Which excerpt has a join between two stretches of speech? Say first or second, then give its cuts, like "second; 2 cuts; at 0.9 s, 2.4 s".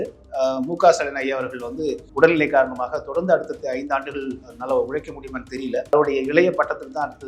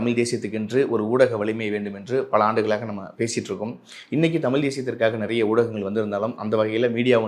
first; 2 cuts; at 2.0 s, 5.9 s